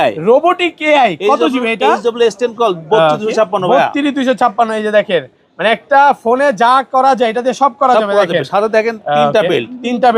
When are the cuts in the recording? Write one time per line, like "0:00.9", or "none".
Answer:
none